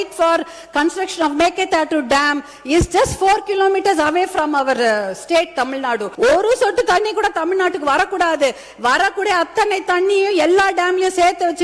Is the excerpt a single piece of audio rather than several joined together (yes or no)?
no